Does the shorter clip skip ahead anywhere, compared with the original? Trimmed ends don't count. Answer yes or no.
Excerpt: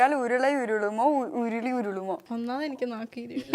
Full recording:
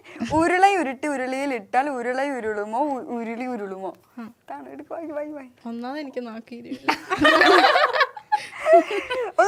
yes